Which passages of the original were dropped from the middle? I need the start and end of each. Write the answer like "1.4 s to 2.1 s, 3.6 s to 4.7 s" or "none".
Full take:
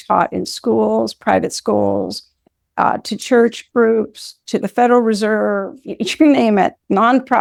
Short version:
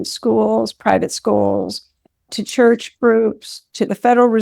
2.7 s to 3.0 s